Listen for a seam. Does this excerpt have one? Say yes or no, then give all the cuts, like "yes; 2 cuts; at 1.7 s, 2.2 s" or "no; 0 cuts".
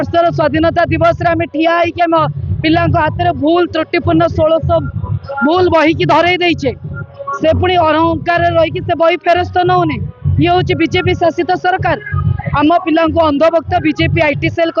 no; 0 cuts